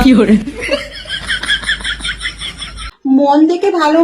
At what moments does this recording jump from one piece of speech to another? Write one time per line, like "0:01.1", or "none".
0:03.1